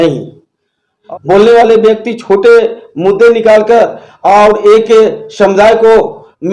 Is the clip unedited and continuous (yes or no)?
no